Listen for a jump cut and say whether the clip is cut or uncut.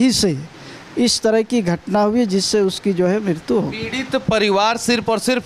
uncut